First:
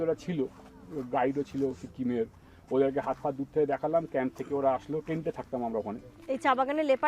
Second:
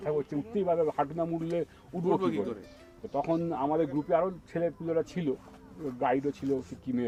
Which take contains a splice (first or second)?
first